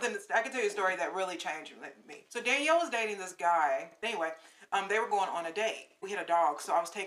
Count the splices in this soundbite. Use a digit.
3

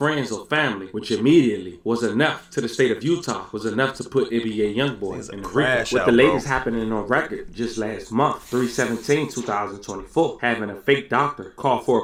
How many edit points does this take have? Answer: 0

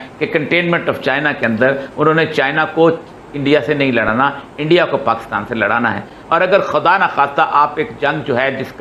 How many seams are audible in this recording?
0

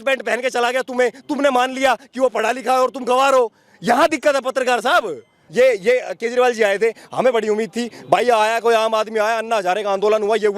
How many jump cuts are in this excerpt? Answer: 1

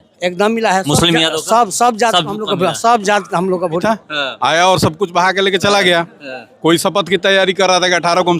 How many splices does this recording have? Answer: 1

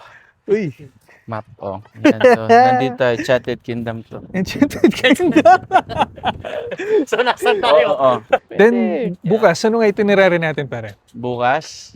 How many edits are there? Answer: 2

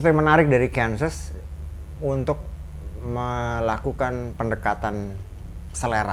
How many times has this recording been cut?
0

